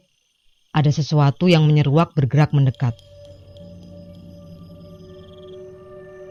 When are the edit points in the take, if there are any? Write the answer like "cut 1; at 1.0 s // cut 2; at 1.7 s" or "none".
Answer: none